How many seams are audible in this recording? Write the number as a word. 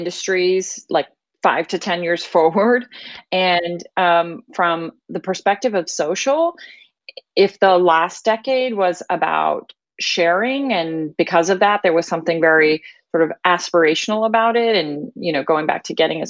one